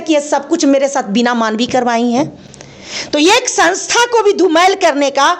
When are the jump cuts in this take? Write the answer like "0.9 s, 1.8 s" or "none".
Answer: none